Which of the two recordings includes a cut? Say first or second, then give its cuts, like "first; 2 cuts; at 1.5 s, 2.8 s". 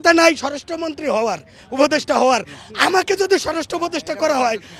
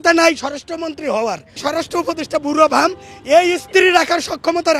second; 1 cut; at 1.6 s